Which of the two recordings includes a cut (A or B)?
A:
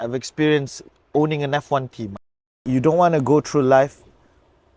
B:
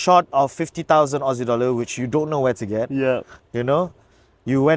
A